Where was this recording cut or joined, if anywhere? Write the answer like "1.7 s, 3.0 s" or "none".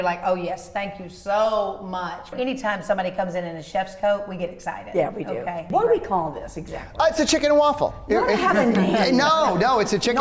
2.3 s, 5.7 s